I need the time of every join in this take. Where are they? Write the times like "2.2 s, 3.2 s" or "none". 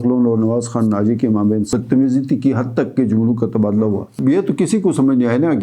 1.7 s, 4.2 s